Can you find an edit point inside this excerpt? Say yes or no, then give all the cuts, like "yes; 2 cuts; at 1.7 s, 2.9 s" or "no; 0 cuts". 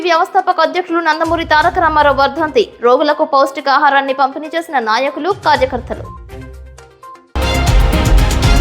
yes; 1 cut; at 7.3 s